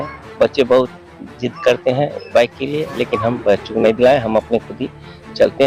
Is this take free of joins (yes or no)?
yes